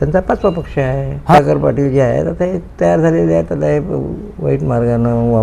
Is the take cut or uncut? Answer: cut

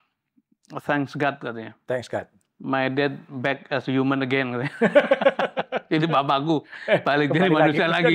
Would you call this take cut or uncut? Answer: uncut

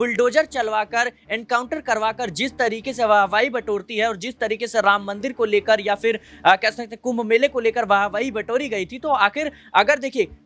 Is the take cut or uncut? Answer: uncut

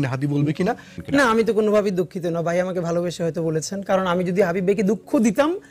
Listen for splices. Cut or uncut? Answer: cut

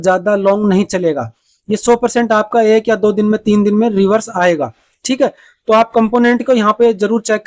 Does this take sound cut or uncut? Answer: uncut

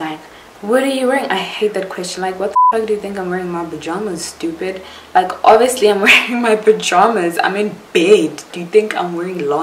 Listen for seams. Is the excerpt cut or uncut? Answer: uncut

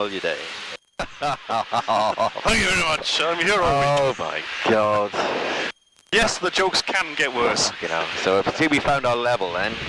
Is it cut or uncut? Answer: cut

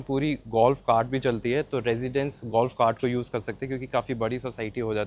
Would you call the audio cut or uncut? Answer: uncut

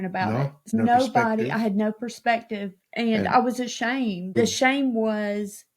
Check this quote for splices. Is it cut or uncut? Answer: cut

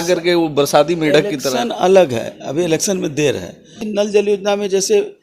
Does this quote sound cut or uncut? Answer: cut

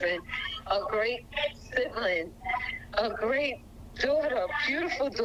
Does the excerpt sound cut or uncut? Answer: uncut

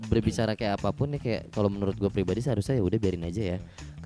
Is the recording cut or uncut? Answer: uncut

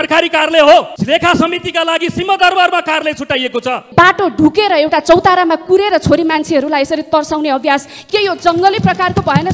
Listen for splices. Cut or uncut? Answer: cut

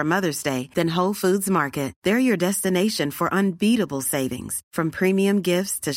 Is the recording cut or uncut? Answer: uncut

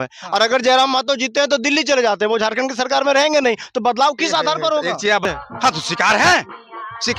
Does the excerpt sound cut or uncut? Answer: cut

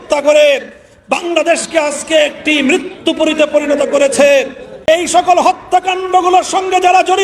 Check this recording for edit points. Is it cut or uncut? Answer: cut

